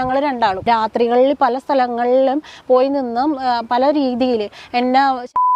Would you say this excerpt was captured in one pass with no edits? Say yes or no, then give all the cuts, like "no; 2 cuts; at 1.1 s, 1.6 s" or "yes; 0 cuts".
yes; 0 cuts